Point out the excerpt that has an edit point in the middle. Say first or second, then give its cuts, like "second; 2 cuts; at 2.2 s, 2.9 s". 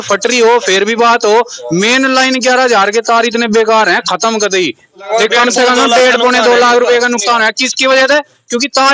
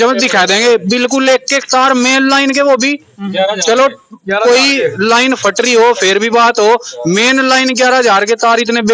first; 1 cut; at 5.1 s